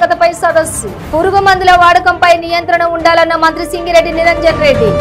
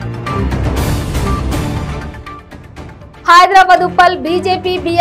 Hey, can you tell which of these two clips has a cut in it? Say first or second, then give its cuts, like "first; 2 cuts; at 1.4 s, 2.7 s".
second; 1 cut; at 1.9 s